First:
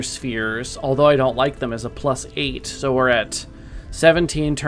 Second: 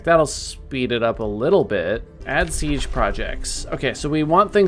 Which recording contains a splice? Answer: second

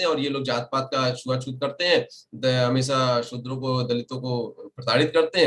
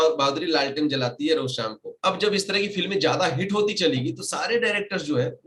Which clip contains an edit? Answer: second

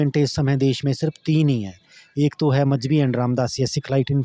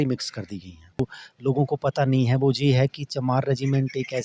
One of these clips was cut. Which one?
second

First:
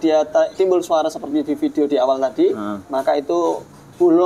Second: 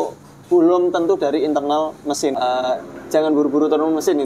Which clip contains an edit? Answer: second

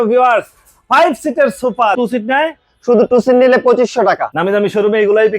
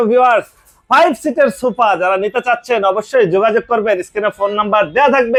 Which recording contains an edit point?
first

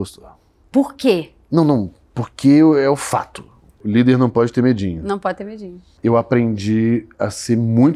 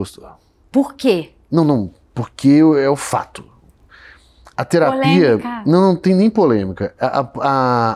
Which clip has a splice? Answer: first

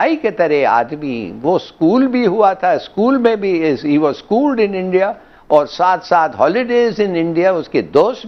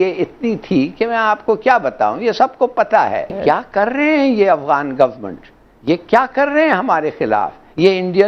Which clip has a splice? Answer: second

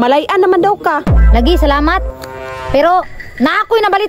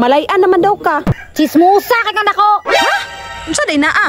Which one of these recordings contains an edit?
second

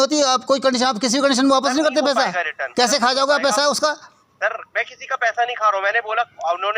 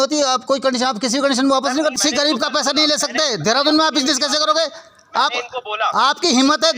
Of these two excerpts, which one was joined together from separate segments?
second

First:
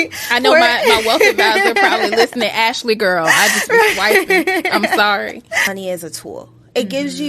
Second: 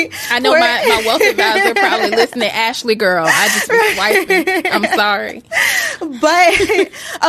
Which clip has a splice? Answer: first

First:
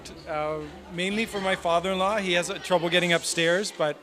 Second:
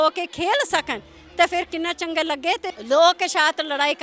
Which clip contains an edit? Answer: second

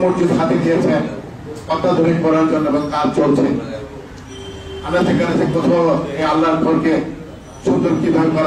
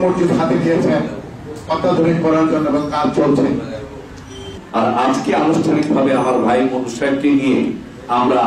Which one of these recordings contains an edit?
second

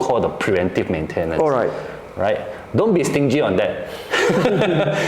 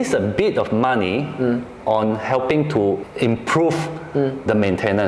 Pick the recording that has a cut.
second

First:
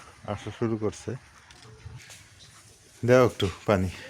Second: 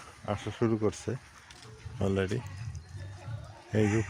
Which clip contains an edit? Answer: first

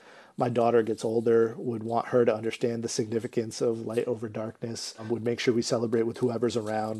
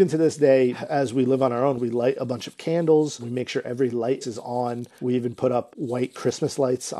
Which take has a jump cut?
second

